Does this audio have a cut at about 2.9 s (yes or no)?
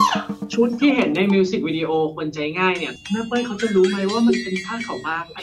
yes